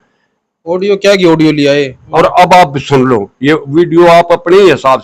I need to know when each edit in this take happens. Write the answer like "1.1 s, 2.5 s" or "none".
2.0 s